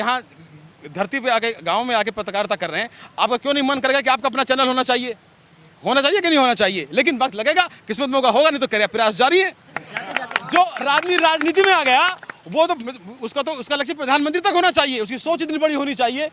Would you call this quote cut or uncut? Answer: uncut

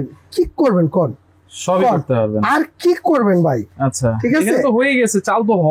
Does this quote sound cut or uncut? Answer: uncut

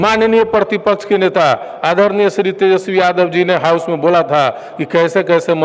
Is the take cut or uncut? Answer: uncut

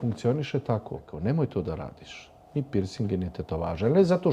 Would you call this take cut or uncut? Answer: cut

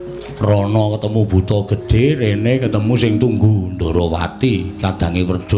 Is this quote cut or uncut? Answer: uncut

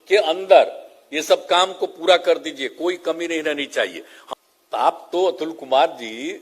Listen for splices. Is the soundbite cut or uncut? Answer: cut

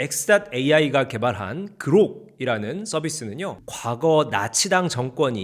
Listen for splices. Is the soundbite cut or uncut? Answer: cut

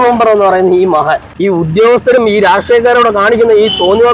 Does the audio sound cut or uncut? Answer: cut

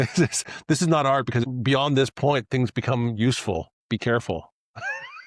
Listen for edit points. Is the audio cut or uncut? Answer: cut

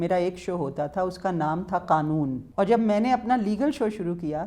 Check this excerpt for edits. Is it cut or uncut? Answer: cut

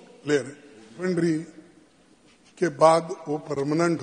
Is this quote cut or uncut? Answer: cut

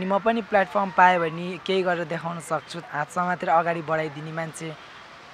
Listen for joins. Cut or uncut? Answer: cut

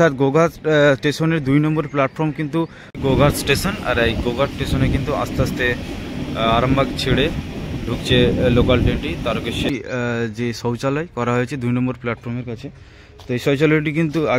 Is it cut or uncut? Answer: cut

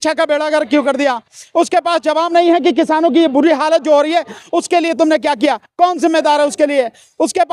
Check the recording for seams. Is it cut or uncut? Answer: uncut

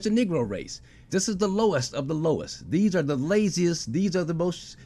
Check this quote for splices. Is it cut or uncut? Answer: cut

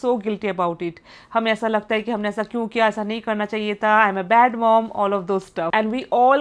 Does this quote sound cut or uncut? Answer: uncut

